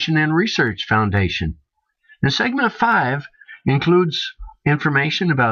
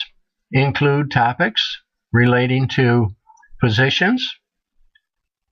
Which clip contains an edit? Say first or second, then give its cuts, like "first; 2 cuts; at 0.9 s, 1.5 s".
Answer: second; 1 cut; at 1.7 s